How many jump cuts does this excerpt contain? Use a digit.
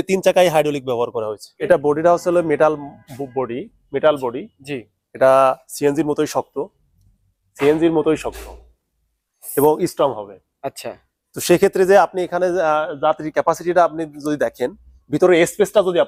0